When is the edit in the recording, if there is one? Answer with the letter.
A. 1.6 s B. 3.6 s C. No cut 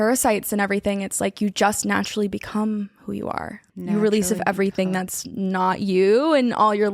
B